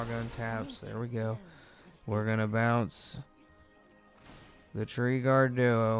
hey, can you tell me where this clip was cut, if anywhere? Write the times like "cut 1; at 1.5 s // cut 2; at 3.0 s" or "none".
none